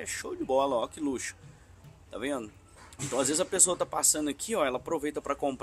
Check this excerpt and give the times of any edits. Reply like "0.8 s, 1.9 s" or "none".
none